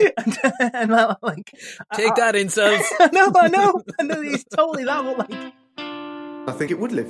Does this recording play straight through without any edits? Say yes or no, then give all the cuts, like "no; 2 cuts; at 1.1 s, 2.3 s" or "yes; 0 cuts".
no; 1 cut; at 5.4 s